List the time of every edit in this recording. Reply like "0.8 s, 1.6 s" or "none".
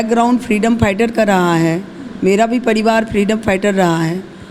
none